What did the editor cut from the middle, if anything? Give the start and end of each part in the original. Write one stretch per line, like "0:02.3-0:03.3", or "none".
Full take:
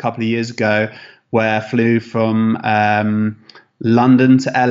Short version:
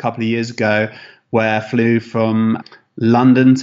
0:02.6-0:03.4